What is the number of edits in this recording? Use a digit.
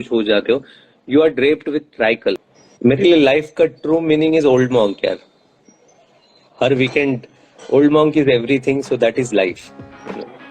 1